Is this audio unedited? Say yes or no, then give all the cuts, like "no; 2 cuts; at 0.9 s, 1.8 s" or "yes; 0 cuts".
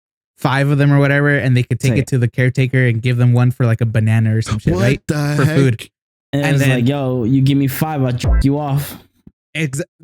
yes; 0 cuts